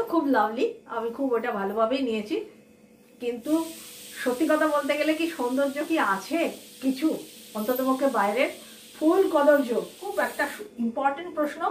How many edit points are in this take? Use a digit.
1